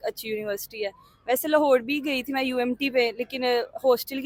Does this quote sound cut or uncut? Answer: uncut